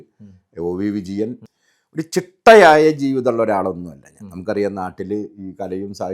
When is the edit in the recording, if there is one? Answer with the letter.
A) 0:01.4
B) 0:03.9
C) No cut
A